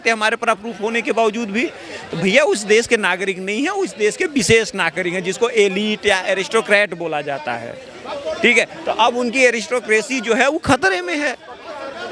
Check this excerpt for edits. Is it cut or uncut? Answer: uncut